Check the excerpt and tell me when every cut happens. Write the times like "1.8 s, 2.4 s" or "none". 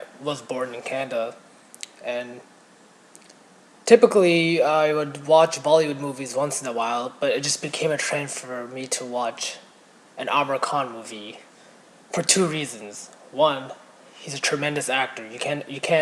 10.6 s